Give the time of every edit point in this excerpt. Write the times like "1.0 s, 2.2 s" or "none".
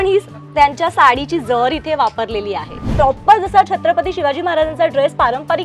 2.9 s